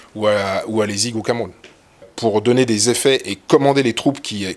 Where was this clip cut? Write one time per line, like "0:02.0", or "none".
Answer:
0:02.1